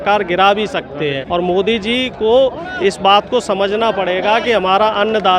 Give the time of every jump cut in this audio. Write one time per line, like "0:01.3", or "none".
0:01.2